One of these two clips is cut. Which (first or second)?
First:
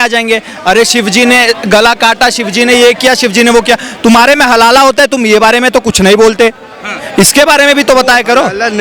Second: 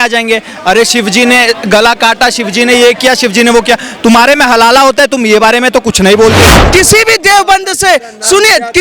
second